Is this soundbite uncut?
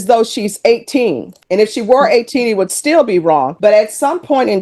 yes; 0 cuts

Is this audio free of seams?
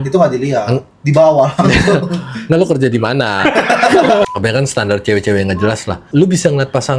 no; 2 cuts; at 4.2 s, 5.9 s

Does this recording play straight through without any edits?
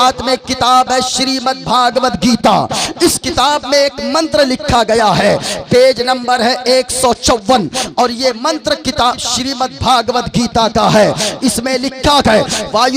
yes; 0 cuts

